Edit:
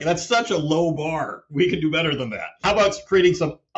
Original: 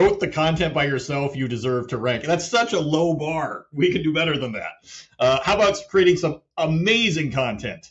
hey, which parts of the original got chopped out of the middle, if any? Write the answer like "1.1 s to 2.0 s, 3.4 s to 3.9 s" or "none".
4.8 s to 5.4 s